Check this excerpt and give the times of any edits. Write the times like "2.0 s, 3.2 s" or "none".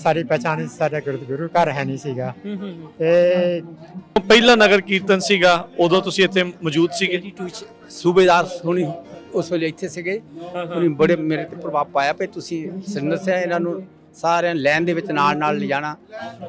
4.2 s